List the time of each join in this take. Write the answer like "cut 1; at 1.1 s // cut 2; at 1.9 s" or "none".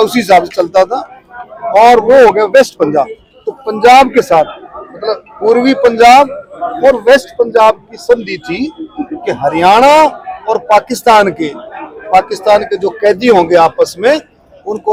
none